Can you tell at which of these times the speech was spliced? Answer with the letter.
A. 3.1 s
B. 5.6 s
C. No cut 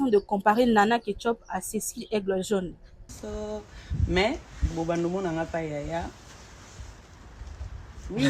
A